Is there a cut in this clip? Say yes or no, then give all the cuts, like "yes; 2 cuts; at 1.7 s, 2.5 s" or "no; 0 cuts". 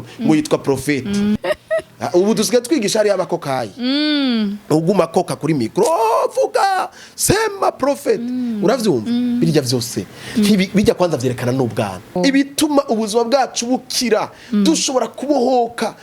yes; 2 cuts; at 1.4 s, 12.2 s